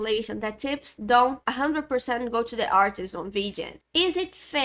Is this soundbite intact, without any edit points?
no; 1 cut; at 3.7 s

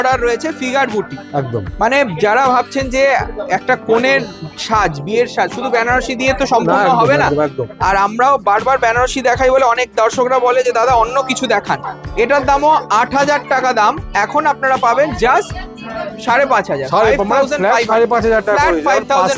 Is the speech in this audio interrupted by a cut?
no; 0 cuts

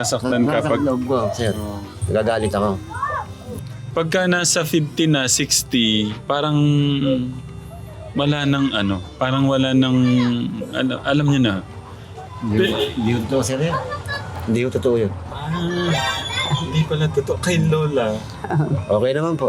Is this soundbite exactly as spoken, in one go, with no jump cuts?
no; 1 cut; at 3.8 s

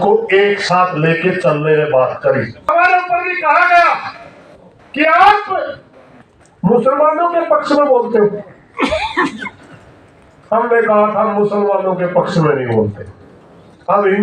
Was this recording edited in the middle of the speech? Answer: yes; 1 cut; at 2.7 s

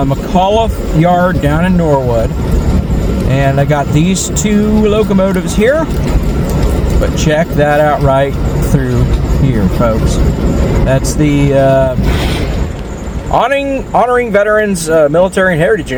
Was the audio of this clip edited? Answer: no; 0 cuts

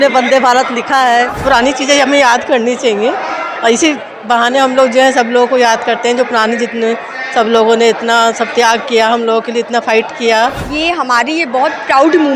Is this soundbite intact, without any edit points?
no; 2 cuts; at 1.4 s, 10.6 s

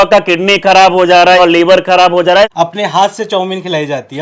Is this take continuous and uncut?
no; 2 cuts; at 1.4 s, 2.5 s

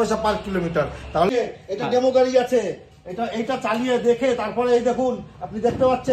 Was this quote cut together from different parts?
yes; 1 cut; at 1.3 s

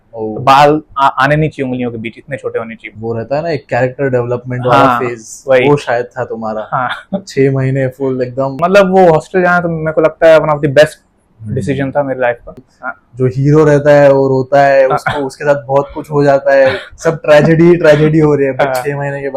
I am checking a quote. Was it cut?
yes; 3 cuts; at 2.9 s, 8.5 s, 12.7 s

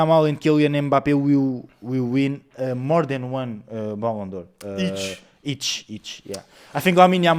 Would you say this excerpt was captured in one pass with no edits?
yes; 0 cuts

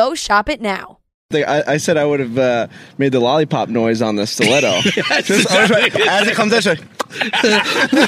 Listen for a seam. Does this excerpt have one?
yes; 1 cut; at 1.3 s

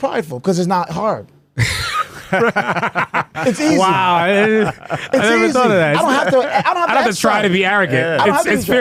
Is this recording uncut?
yes; 0 cuts

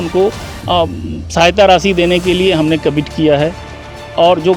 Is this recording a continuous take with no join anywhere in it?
yes; 0 cuts

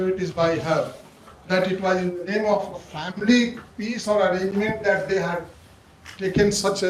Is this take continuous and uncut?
yes; 0 cuts

